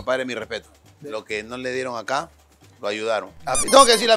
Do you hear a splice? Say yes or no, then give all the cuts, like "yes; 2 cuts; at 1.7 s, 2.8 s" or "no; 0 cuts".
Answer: no; 0 cuts